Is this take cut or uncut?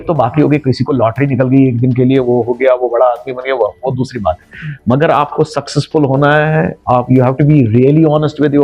uncut